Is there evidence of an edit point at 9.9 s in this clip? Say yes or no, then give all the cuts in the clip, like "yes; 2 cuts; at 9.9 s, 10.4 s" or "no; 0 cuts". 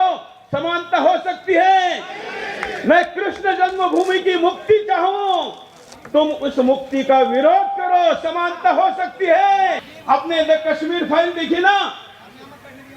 yes; 1 cut; at 9.9 s